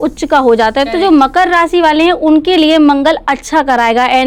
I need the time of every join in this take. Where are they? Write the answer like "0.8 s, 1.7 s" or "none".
none